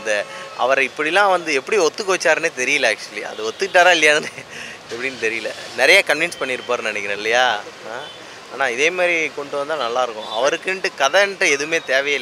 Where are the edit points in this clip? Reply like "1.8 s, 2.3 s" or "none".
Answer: none